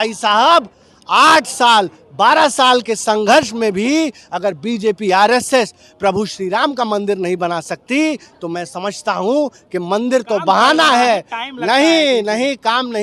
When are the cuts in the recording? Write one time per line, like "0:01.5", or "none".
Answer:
none

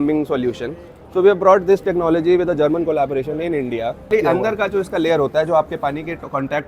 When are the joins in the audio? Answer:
0:04.1

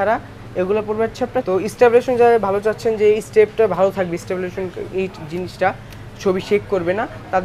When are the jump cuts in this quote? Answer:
0:01.4

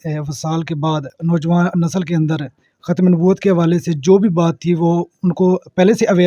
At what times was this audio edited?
0:01.1

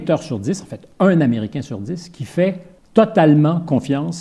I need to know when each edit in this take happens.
0:02.7

